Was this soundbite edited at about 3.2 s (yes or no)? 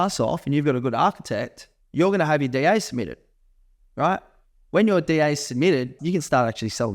no